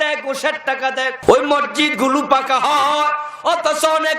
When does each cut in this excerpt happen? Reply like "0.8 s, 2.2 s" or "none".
1.2 s